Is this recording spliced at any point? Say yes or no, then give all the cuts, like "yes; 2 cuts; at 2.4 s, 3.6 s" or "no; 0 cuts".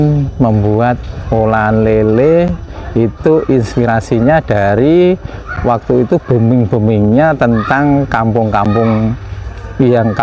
no; 0 cuts